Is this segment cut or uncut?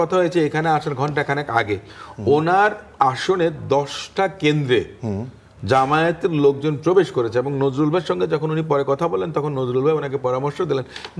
uncut